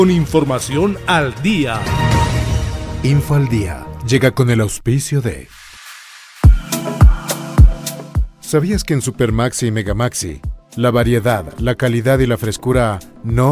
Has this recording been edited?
yes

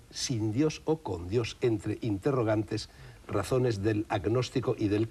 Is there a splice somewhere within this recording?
no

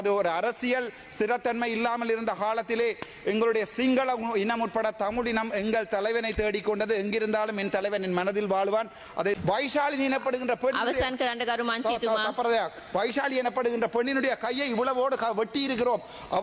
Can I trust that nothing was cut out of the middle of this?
no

